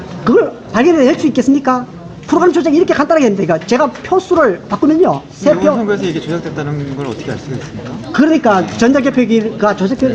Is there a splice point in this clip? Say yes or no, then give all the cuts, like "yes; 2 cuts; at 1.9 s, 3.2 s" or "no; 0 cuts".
no; 0 cuts